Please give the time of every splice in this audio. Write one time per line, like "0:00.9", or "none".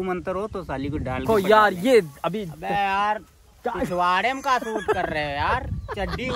0:01.2